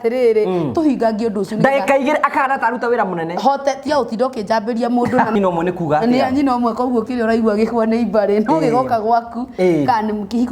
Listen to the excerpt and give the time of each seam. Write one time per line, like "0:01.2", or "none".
0:05.4